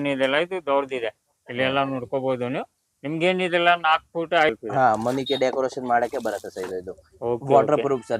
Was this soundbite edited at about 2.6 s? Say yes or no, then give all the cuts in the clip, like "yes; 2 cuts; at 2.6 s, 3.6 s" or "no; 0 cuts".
no; 1 cut; at 4.5 s